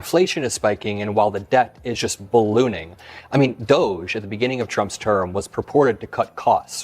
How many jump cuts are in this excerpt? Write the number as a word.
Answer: one